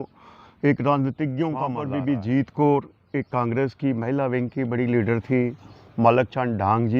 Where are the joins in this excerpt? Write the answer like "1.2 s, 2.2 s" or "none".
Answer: 1.8 s

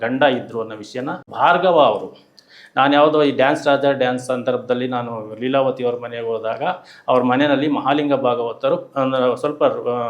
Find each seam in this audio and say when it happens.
1.3 s

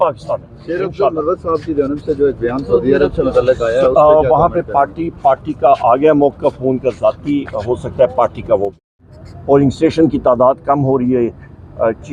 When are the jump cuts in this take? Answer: 8.7 s

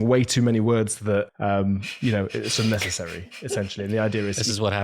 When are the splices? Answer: 1.3 s

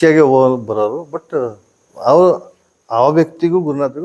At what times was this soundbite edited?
none

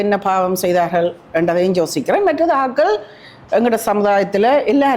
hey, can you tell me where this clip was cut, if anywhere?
none

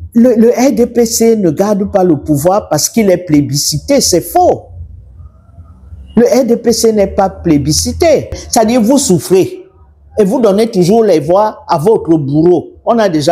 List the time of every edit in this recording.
8.4 s

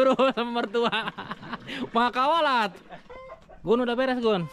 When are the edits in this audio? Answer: 3.3 s

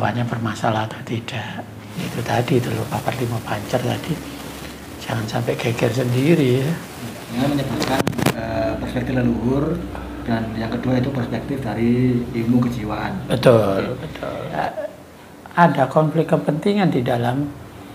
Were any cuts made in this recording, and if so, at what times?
1.8 s, 7.4 s, 14.6 s

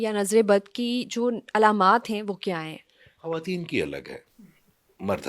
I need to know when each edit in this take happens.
none

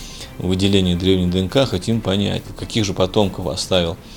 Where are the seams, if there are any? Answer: 2.5 s

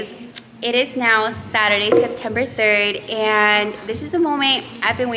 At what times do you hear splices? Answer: none

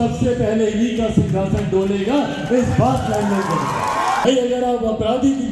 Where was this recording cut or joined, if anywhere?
4.2 s

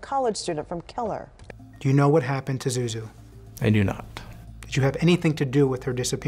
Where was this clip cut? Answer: 1.4 s

